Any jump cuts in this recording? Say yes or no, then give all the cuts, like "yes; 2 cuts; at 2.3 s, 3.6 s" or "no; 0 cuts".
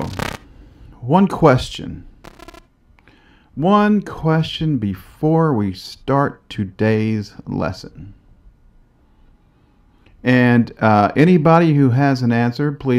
yes; 1 cut; at 7.3 s